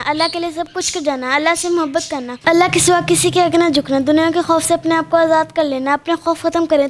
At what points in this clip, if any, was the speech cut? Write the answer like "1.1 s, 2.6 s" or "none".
2.3 s